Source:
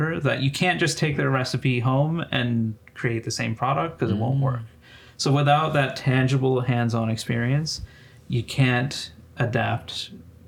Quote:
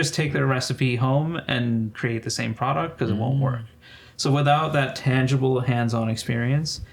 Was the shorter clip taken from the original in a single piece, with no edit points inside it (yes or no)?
no